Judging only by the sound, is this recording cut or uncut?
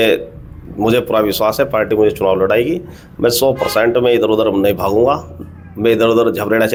uncut